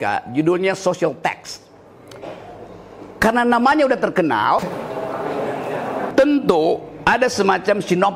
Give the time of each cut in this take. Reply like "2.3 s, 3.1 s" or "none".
4.7 s